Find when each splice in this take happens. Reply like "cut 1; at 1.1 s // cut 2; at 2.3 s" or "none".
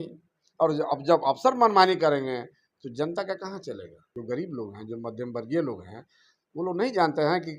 cut 1; at 4.1 s